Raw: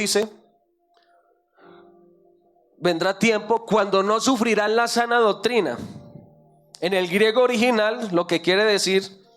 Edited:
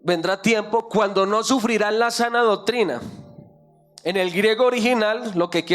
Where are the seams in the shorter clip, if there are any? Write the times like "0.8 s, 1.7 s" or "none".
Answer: none